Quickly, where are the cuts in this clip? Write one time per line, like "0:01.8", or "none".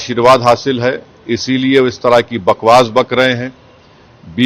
none